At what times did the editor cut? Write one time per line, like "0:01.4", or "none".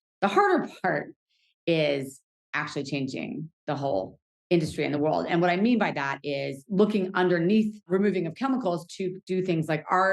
0:06.6
0:07.9